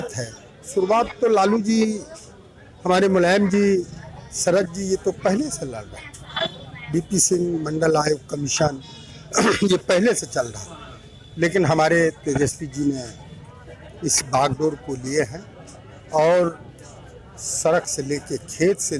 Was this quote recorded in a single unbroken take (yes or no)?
yes